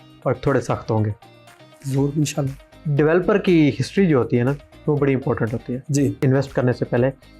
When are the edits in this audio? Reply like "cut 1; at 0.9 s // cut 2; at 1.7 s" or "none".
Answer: cut 1; at 6.2 s